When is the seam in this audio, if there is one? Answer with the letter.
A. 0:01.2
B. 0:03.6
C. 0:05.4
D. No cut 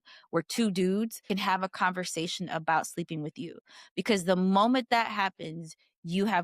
A